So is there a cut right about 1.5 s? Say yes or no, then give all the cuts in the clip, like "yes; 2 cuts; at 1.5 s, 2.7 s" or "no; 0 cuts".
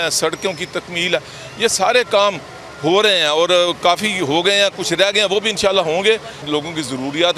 no; 1 cut; at 6.5 s